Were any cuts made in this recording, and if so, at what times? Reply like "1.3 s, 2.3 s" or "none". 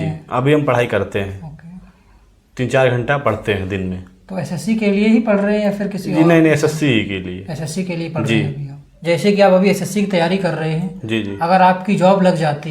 9.0 s